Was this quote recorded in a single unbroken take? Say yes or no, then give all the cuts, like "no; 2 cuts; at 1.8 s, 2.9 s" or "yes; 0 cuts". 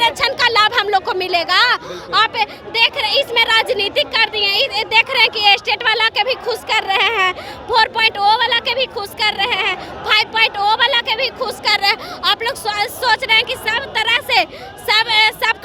yes; 0 cuts